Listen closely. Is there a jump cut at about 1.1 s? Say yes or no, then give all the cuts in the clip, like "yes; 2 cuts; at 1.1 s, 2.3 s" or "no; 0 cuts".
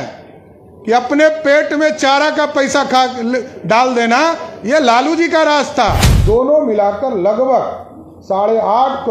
no; 1 cut; at 6.1 s